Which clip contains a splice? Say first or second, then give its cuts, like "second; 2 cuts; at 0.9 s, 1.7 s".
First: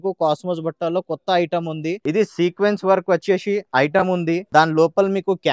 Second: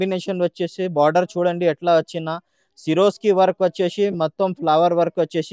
first; 2 cuts; at 2.0 s, 4.4 s